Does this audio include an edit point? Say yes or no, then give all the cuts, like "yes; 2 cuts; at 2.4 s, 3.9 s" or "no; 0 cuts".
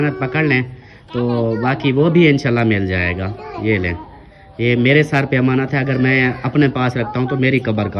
no; 0 cuts